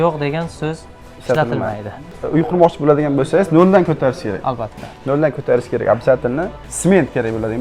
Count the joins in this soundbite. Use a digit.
1